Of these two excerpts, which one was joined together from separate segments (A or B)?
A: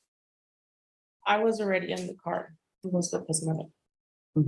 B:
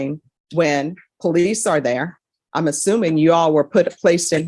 A